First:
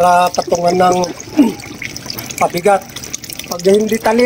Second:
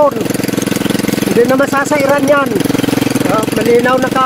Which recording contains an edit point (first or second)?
second